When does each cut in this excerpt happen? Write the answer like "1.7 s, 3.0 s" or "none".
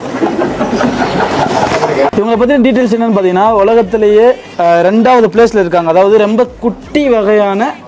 2.1 s, 4.5 s